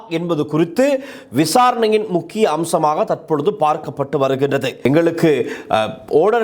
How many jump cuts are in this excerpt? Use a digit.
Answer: 1